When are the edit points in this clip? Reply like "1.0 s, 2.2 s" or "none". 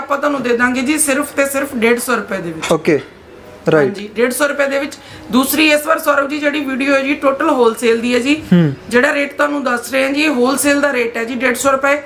none